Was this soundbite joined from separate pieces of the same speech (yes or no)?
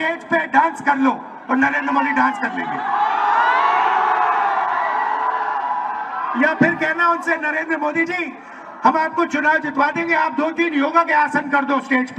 no